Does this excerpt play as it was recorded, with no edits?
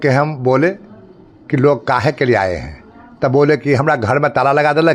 yes; 0 cuts

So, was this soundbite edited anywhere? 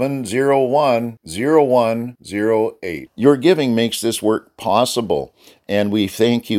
no; 0 cuts

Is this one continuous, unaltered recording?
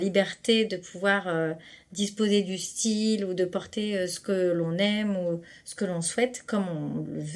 yes; 0 cuts

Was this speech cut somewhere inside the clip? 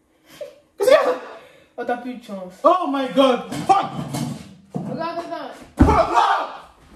no; 0 cuts

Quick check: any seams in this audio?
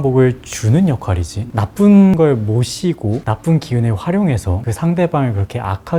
no; 0 cuts

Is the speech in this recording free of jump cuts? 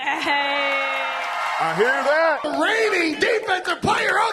no; 1 cut; at 2.5 s

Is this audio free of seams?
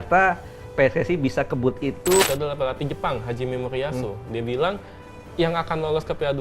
no; 1 cut; at 2.2 s

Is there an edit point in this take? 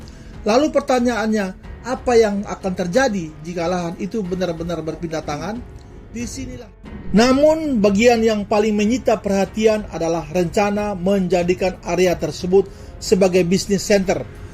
yes; 1 cut; at 6.5 s

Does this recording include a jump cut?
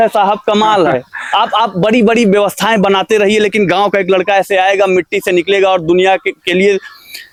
no; 0 cuts

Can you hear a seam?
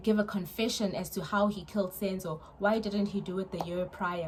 no; 0 cuts

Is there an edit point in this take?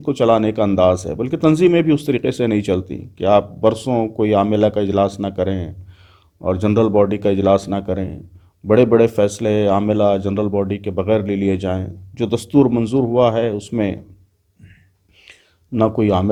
no; 0 cuts

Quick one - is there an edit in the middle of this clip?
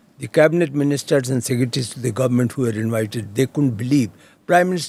no; 0 cuts

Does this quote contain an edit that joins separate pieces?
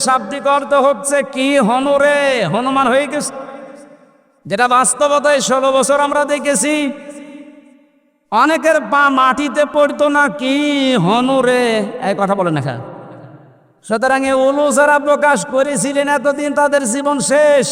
no; 0 cuts

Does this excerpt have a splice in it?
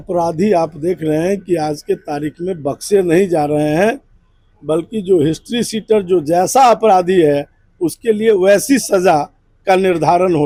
no; 0 cuts

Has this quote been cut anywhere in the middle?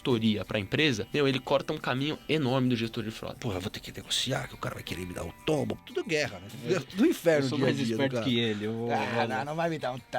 yes; 3 cuts; at 1.0 s, 3.4 s, 6.3 s

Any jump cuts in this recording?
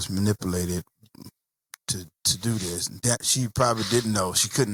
no; 0 cuts

